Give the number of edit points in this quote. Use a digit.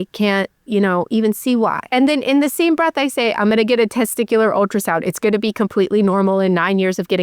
1